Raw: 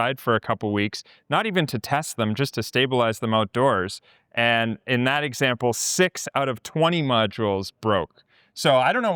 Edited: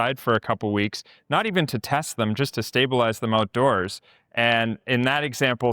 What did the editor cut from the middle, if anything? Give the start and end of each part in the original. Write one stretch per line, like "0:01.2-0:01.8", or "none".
none